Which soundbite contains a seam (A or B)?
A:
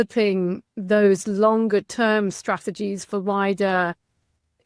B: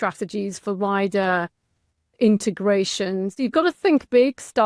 B